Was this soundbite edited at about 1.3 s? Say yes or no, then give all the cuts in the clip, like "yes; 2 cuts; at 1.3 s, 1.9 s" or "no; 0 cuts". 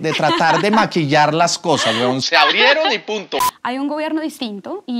no; 1 cut; at 3.4 s